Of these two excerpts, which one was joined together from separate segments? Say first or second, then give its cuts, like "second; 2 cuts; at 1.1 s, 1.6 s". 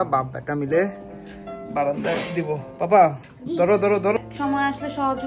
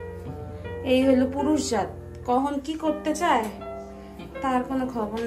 first; 1 cut; at 4.2 s